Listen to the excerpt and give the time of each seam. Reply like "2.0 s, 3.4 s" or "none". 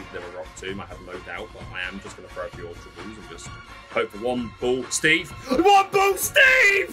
none